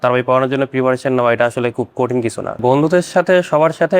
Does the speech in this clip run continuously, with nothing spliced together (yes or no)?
yes